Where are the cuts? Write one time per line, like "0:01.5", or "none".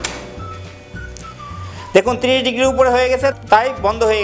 0:03.3